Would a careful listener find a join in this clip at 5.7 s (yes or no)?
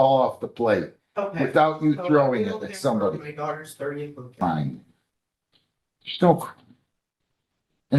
no